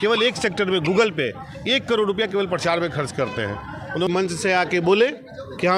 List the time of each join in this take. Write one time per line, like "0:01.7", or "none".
0:04.1